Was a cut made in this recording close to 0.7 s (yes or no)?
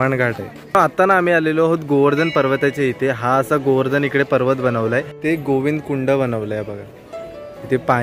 yes